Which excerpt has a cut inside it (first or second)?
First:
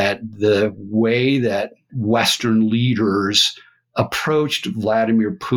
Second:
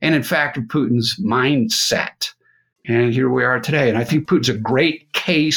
second